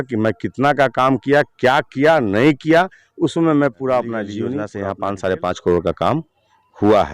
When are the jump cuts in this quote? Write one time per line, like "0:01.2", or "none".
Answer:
0:04.6

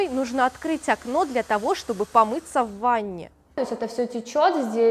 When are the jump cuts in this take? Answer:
0:03.5

